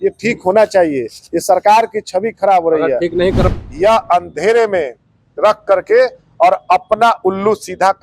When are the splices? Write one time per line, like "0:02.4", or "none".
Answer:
0:03.4